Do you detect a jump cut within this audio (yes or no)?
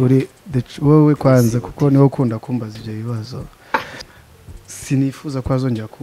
yes